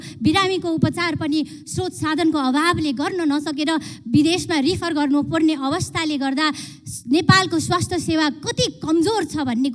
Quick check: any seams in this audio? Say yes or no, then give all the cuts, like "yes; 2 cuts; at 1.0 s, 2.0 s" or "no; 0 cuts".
no; 0 cuts